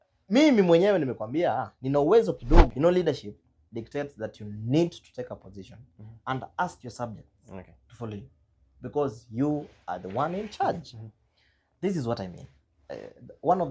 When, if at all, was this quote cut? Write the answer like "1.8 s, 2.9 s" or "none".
2.7 s